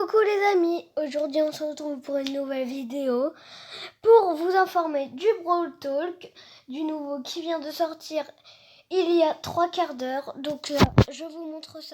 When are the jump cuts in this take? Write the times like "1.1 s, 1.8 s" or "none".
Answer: 1.2 s